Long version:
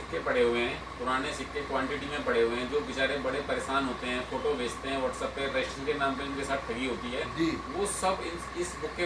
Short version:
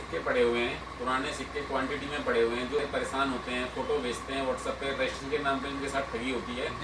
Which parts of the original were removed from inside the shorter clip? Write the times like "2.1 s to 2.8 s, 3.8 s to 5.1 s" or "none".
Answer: 2.8 s to 3.4 s